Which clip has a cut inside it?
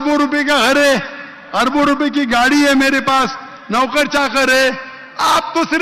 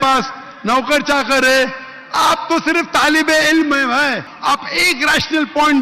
second; 1 cut; at 4.3 s

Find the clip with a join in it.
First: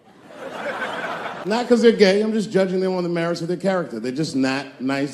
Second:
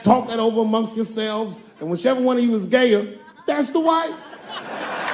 first; 1 cut; at 1.6 s

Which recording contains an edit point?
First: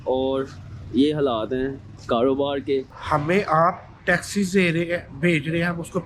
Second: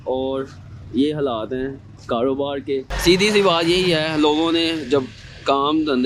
first; 1 cut; at 2.9 s

